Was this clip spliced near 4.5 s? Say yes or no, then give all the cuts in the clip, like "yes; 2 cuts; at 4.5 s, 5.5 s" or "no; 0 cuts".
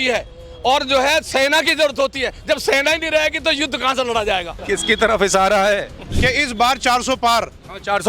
yes; 2 cuts; at 4.5 s, 6.0 s